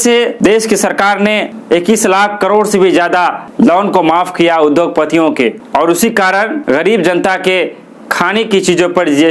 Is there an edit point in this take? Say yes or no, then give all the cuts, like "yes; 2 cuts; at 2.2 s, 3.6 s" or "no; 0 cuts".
no; 0 cuts